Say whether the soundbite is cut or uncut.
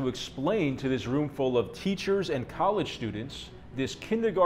uncut